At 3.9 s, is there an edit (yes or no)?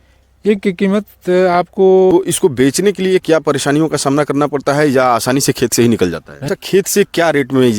no